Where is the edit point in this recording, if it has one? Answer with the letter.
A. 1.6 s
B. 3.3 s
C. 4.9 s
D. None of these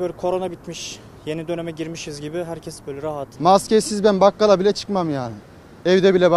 B